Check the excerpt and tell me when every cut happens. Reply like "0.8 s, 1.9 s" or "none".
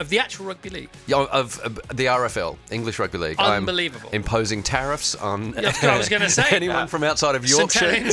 none